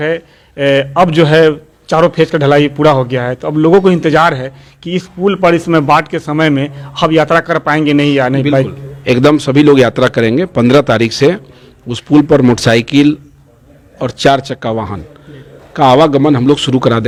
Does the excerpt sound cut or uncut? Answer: uncut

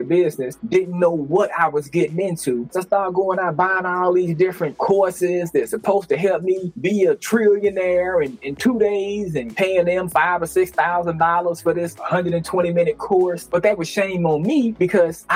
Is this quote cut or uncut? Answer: cut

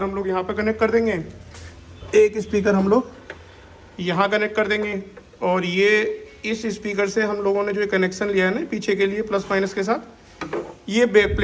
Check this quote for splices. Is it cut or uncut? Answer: uncut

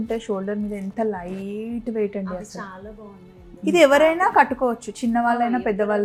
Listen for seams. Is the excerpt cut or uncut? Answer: uncut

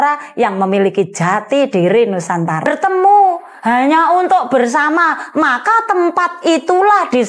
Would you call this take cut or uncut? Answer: cut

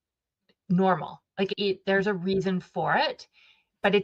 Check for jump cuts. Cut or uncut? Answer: cut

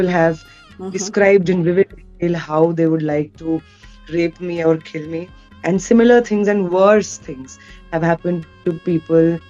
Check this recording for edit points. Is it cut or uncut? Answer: uncut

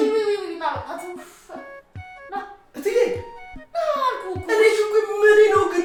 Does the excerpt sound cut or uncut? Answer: uncut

